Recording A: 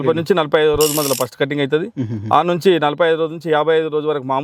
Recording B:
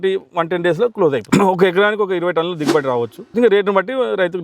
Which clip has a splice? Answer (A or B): B